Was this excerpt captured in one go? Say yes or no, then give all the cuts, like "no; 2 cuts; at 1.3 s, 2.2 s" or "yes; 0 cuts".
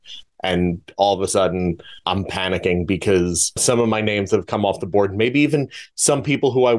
no; 2 cuts; at 2.0 s, 3.6 s